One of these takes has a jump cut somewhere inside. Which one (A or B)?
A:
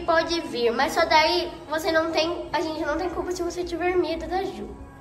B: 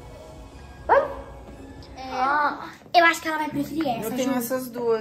B